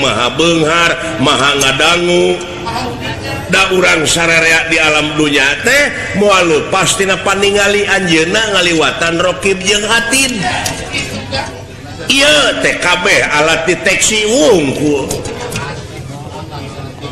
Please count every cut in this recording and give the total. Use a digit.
0